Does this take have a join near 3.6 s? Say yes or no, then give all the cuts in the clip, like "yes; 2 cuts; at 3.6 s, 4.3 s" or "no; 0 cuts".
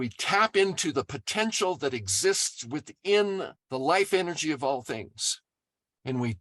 yes; 1 cut; at 3.6 s